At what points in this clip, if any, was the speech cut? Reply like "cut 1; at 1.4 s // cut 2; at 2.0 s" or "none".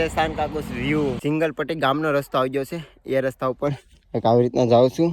cut 1; at 1.2 s